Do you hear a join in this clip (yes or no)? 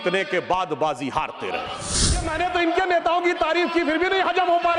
yes